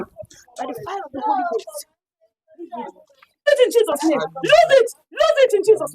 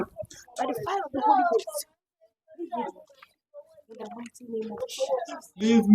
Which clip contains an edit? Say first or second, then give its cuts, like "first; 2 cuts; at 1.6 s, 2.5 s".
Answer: first; 1 cut; at 3.4 s